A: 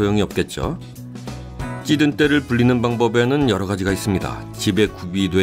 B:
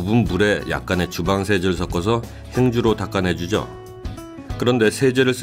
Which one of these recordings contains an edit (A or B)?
A